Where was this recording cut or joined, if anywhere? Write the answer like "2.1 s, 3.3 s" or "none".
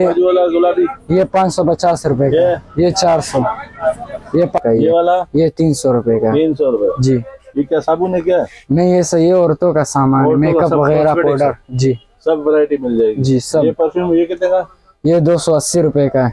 4.6 s

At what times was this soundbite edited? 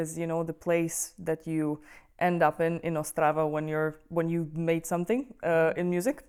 none

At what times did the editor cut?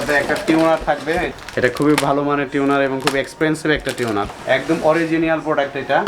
1.4 s, 4.3 s

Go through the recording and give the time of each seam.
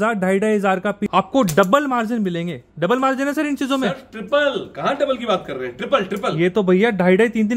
1.0 s

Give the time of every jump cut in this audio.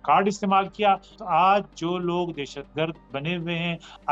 1.1 s

